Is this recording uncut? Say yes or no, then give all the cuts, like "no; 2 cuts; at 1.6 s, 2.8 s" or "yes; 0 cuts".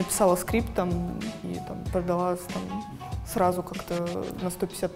no; 1 cut; at 1.4 s